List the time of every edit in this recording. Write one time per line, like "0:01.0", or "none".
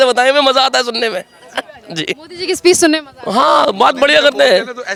none